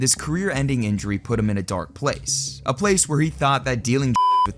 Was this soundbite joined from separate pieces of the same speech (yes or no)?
no